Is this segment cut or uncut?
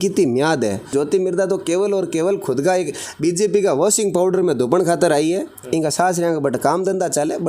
cut